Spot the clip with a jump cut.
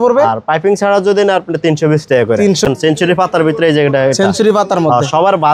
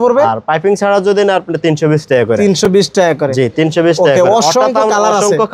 first; 1 cut; at 2.7 s

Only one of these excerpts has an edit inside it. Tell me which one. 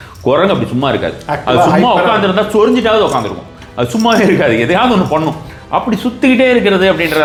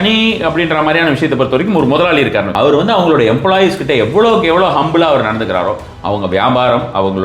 second; 1 cut; at 2.5 s

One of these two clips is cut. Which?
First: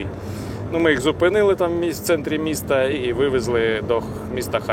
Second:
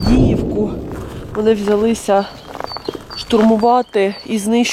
first; 1 cut; at 3.0 s

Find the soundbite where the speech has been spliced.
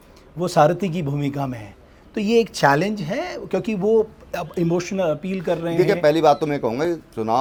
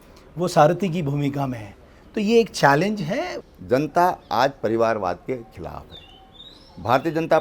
second; 1 cut; at 3.3 s

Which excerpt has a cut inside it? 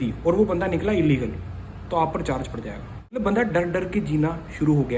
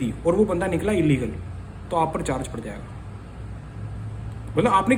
first; 1 cut; at 3.2 s

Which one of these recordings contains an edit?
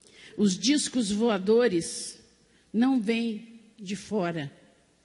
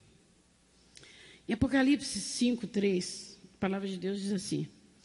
first; 1 cut; at 2.2 s

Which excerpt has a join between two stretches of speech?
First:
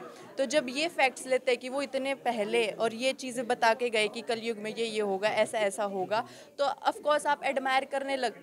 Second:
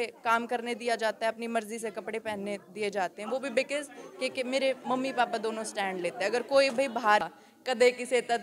second; 1 cut; at 7.2 s

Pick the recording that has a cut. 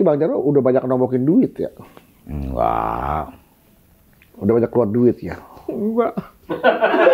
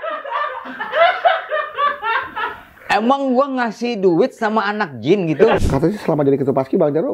second; 1 cut; at 5.6 s

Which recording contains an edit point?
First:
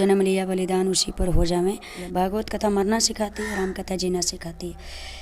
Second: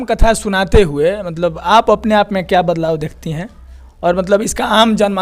first; 1 cut; at 2.0 s

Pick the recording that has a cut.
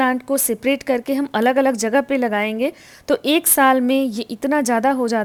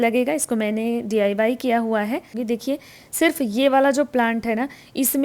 second; 1 cut; at 2.4 s

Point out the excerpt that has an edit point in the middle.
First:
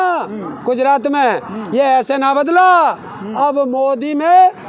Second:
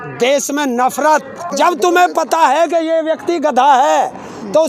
second; 1 cut; at 1.4 s

